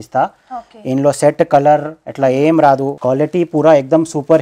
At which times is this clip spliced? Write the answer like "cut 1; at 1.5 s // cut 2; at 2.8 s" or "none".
cut 1; at 2.9 s